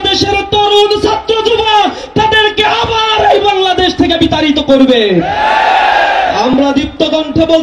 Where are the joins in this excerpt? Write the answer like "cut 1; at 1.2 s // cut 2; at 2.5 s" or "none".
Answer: none